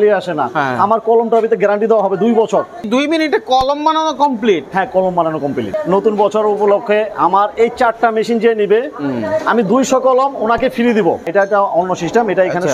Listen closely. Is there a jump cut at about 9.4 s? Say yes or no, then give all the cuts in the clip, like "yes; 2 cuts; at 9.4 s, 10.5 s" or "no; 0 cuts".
no; 3 cuts; at 2.8 s, 5.7 s, 11.3 s